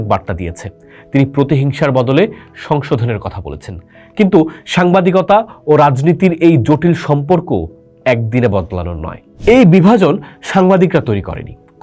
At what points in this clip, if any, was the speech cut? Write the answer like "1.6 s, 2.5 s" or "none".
9.2 s